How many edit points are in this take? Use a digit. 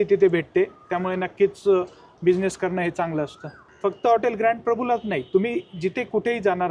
1